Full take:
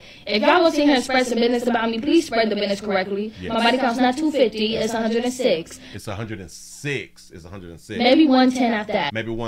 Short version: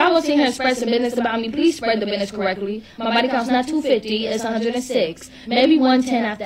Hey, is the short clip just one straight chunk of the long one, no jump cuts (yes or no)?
no